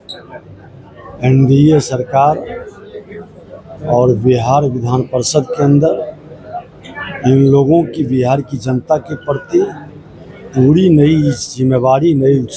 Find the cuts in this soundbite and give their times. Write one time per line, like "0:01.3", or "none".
none